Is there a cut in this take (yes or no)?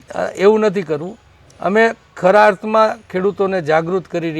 no